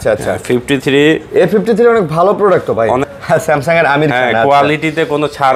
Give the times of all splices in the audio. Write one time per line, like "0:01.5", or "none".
0:03.1